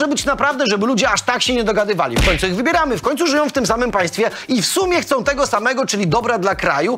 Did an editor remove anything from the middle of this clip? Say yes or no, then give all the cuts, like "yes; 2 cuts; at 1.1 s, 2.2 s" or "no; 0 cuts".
no; 0 cuts